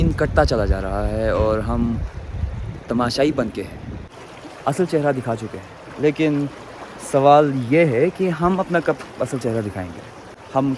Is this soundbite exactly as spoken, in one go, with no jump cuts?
no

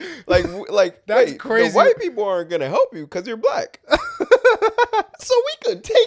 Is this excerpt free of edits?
yes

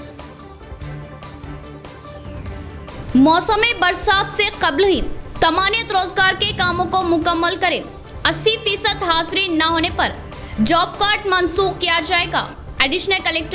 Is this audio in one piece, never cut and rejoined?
yes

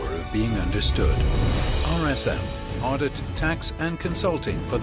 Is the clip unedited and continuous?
yes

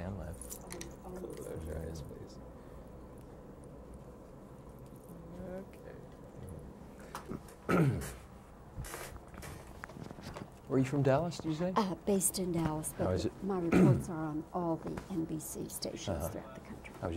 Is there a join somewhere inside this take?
yes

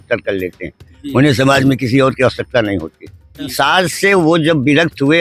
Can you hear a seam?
yes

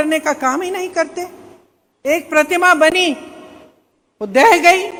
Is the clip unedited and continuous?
yes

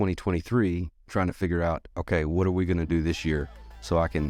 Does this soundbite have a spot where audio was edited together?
no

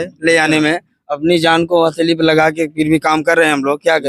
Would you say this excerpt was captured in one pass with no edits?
yes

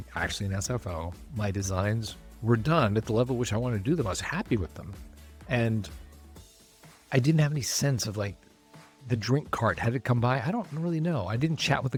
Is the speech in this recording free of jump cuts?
yes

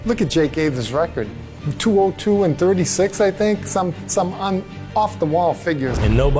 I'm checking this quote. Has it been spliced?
no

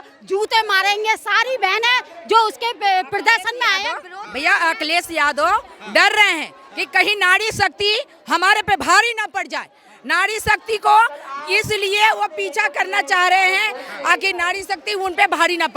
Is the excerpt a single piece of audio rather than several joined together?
yes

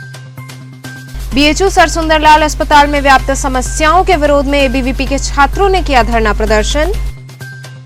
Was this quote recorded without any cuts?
no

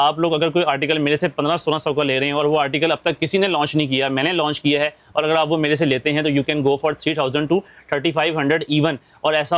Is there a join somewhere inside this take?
no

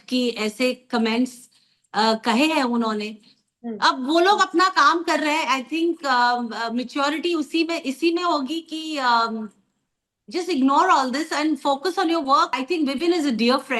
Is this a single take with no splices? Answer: no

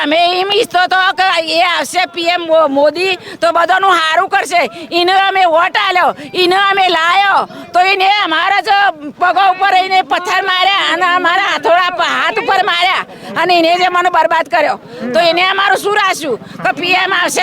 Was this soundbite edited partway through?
no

